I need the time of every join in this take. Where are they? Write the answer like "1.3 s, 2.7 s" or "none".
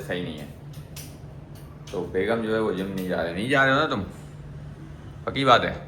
none

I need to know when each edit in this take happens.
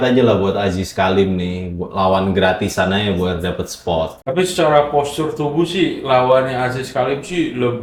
none

